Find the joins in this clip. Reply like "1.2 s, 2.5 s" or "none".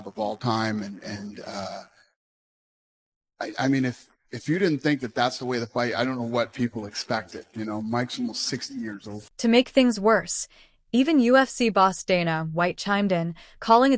9.7 s